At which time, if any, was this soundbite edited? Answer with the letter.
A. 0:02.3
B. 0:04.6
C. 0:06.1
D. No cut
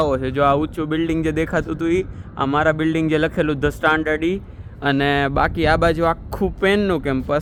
D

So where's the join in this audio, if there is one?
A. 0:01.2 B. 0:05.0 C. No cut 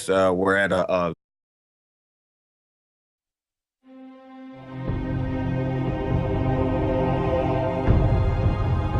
C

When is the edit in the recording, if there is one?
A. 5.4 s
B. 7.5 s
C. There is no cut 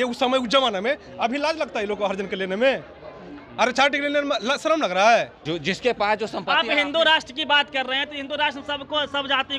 A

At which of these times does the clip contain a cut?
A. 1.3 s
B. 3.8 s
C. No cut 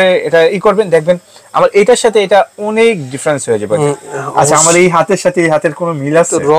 B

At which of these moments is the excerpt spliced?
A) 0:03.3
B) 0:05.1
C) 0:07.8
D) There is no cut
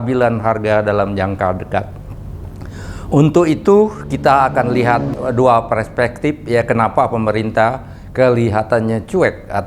B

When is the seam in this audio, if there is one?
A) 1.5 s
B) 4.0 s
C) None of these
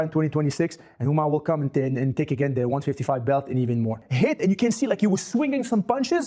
B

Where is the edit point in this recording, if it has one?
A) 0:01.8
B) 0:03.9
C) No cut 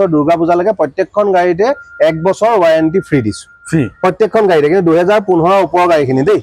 C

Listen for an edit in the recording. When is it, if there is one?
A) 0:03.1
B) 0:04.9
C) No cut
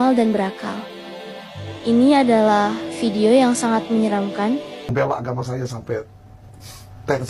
B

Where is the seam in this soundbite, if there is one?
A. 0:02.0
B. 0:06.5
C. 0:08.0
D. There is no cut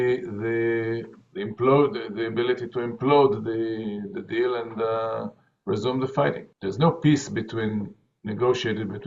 B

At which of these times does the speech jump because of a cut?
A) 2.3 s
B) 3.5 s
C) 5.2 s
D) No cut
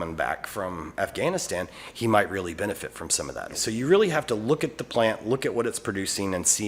B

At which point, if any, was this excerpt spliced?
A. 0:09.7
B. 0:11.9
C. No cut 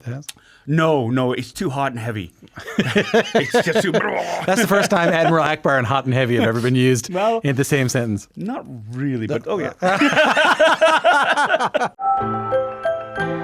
B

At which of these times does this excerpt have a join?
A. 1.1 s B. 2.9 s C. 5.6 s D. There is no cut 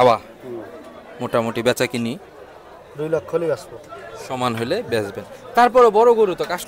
D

